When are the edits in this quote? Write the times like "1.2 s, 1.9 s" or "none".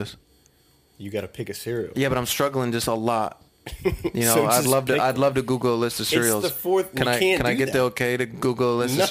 none